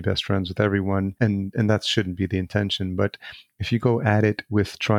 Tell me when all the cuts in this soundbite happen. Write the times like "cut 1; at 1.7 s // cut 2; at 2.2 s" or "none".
cut 1; at 1.1 s